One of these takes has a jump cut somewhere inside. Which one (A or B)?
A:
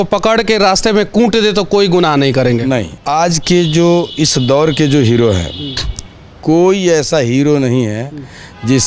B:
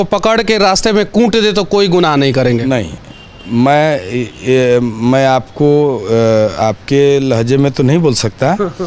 A